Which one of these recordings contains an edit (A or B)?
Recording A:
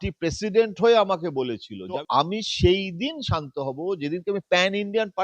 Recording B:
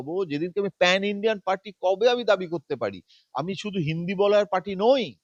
A